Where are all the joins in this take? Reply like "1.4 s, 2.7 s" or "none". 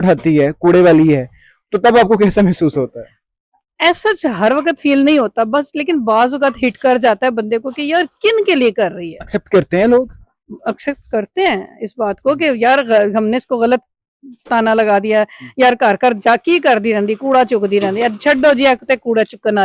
none